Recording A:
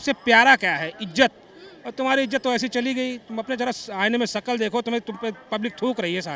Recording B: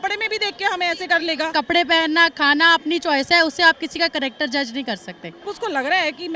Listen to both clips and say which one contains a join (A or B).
B